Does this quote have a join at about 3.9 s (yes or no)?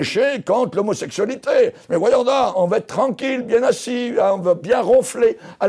no